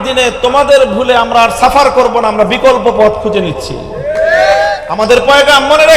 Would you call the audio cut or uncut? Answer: cut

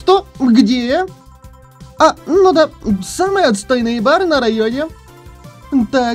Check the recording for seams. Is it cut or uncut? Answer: uncut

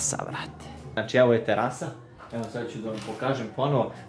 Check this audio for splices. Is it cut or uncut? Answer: cut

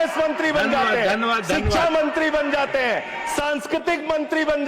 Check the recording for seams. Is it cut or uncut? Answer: uncut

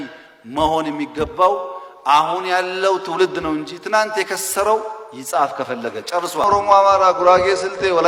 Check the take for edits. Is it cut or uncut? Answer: uncut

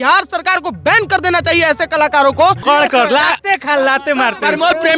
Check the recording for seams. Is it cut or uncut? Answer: cut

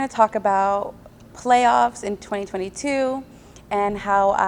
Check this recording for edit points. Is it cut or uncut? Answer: uncut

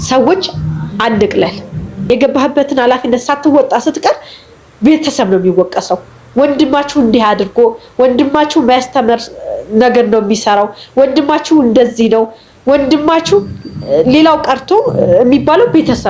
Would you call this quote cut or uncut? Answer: cut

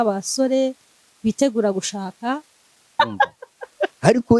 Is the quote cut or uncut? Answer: cut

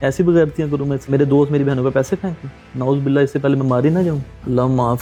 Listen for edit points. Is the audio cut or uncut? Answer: uncut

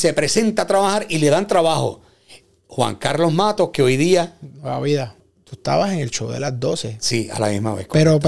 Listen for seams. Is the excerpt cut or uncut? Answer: cut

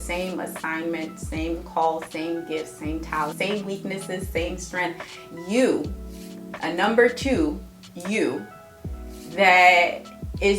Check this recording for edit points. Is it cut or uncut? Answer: cut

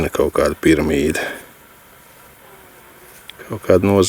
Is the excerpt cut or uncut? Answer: uncut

